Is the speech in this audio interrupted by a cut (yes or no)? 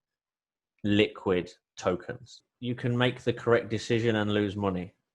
yes